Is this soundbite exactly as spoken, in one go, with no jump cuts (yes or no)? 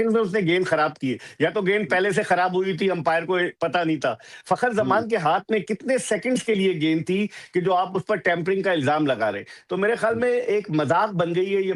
yes